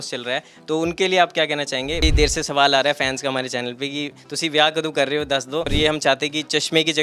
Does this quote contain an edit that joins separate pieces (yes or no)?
yes